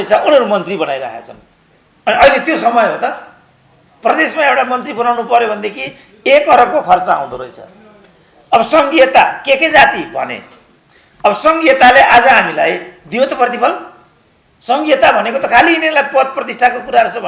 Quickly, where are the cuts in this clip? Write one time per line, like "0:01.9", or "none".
none